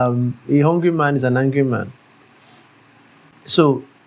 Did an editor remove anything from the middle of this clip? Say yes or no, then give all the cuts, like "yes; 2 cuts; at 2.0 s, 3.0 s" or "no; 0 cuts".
no; 0 cuts